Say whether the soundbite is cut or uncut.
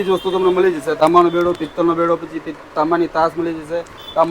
cut